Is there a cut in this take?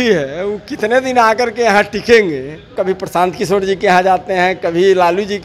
yes; 1 cut; at 2.7 s

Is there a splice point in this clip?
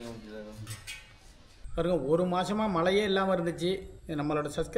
yes; 1 cut; at 1.5 s

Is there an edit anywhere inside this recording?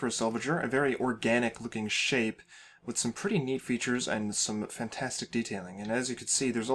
no; 0 cuts

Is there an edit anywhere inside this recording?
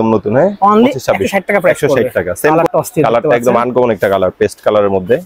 yes; 1 cut; at 2.5 s

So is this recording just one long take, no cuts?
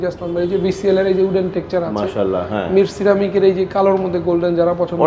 yes; 0 cuts

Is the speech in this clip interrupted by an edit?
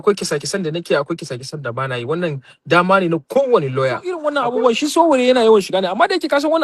yes; 1 cut; at 4.3 s

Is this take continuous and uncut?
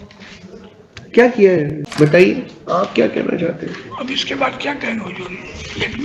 no; 1 cut; at 1.8 s

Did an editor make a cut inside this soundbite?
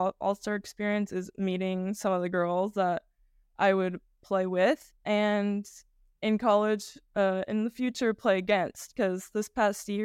no; 0 cuts

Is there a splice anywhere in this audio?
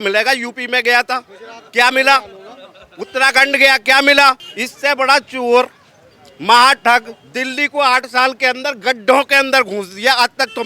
yes; 1 cut; at 4.4 s

